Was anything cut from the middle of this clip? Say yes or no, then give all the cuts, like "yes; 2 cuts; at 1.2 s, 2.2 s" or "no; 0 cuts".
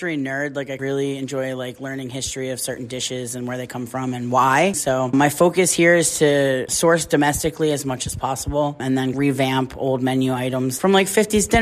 yes; 3 cuts; at 0.8 s, 5.1 s, 9.1 s